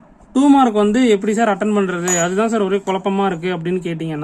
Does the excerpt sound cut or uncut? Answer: uncut